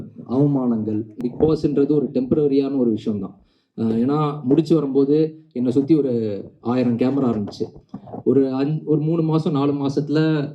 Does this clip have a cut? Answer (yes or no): yes